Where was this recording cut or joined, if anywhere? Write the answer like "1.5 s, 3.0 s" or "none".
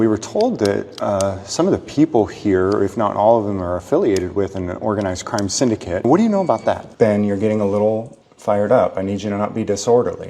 6.0 s, 6.9 s

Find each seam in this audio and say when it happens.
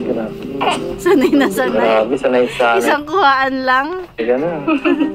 none

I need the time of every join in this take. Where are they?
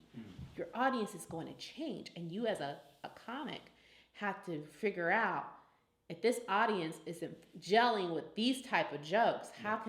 none

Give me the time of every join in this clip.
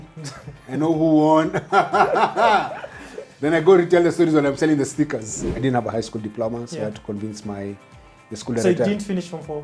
5.4 s

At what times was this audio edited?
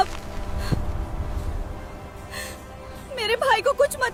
none

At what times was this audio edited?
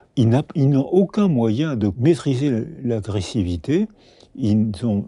2.0 s

